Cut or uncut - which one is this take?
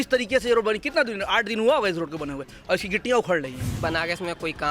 cut